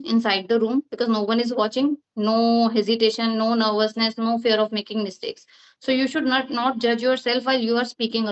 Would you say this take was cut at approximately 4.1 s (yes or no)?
no